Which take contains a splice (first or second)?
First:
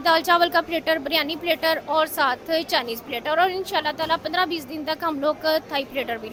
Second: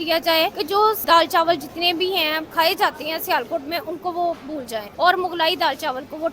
second